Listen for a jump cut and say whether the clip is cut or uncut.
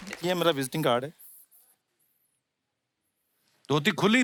uncut